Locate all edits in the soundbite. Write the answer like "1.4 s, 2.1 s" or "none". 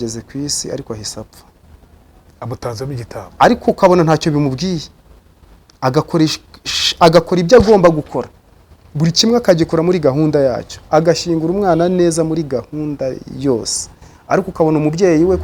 none